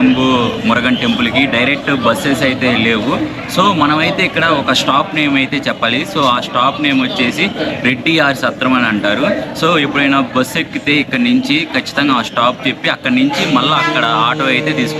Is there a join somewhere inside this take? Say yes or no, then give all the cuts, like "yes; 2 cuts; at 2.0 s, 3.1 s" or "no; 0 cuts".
no; 0 cuts